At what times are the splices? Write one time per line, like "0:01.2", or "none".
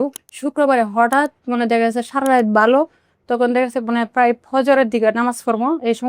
none